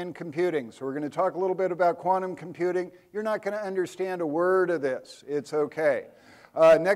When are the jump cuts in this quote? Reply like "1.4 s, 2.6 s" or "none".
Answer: 1.4 s